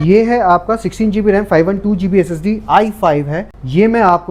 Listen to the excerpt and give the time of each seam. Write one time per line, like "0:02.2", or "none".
none

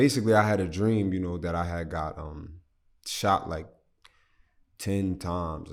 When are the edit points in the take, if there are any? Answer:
none

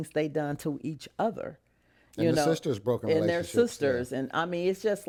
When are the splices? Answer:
none

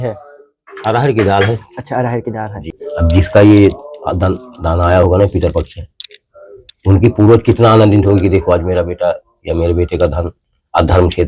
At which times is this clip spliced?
0:02.7

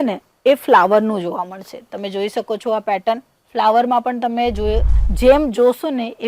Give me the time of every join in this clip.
0:04.9

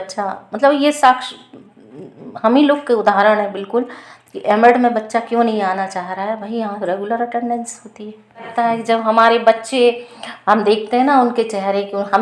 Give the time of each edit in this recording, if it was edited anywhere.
0:08.5

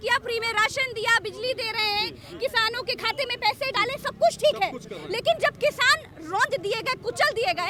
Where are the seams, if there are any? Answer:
none

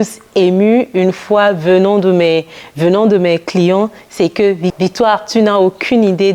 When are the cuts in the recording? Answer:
none

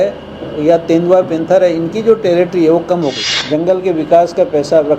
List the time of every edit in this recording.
0:03.3

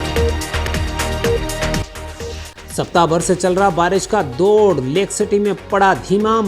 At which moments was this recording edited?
0:01.8

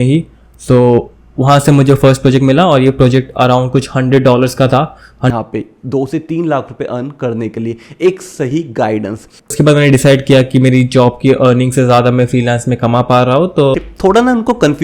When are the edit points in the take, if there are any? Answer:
0:05.3
0:09.5
0:13.7

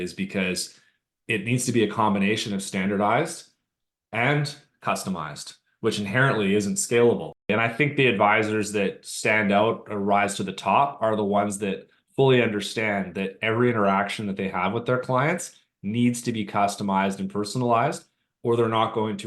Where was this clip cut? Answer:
0:07.5

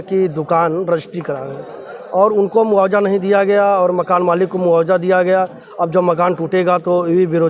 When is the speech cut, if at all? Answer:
none

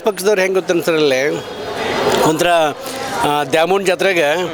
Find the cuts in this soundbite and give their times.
none

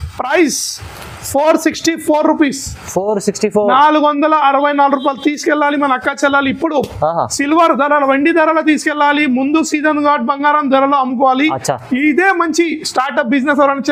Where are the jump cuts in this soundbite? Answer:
none

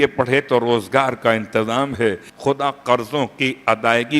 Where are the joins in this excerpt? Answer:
0:02.3

